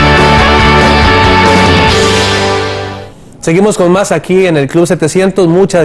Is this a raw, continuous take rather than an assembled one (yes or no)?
yes